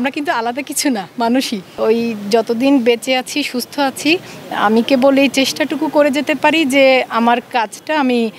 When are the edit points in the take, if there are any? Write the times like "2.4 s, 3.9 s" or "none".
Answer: 1.7 s